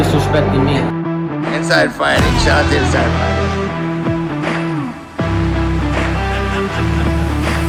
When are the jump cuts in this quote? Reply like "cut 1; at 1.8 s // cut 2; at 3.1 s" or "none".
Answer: none